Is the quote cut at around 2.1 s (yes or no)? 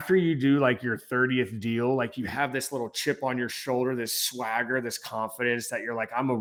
no